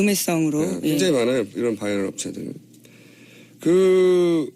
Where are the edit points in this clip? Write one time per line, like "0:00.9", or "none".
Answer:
0:01.9